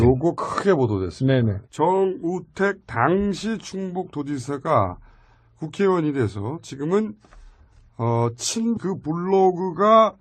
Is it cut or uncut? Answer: uncut